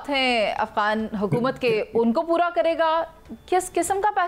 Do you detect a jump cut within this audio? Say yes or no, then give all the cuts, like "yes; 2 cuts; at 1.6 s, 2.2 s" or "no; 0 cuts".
no; 0 cuts